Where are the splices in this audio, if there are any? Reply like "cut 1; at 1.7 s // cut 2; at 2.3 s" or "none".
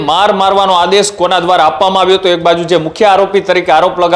none

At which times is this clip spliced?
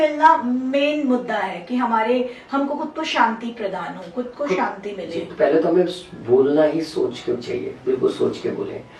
cut 1; at 5.3 s

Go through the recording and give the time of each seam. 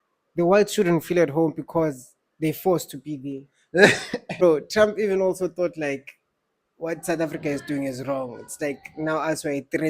cut 1; at 4.3 s

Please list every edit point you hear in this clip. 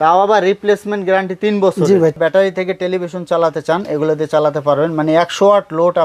cut 1; at 2.2 s

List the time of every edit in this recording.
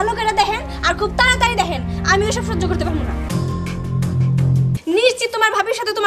cut 1; at 4.7 s

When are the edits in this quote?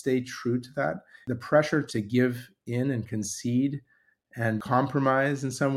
cut 1; at 1.1 s // cut 2; at 1.9 s // cut 3; at 4.6 s

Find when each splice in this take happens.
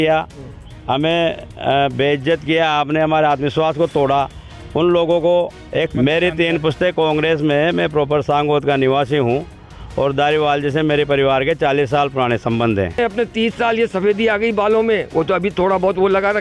cut 1; at 5.9 s // cut 2; at 13.0 s

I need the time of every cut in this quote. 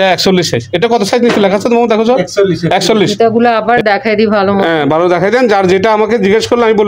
cut 1; at 3.1 s

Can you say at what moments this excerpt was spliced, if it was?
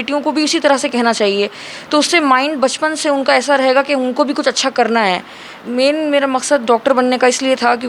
cut 1; at 5.6 s

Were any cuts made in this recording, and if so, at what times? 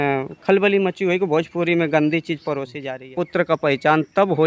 cut 1; at 2.7 s

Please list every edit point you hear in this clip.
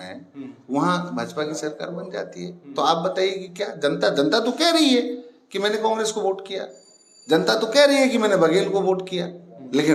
none

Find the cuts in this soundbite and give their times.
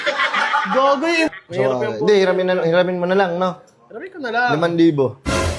cut 1; at 1.3 s

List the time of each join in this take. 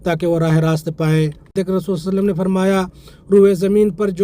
cut 1; at 1.5 s

